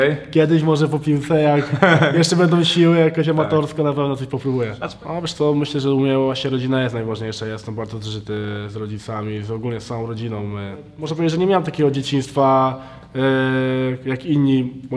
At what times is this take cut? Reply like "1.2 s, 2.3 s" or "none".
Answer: 4.8 s, 11.0 s